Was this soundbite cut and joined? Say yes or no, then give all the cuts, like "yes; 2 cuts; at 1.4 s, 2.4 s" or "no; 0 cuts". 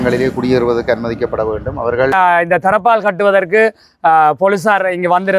yes; 1 cut; at 2.1 s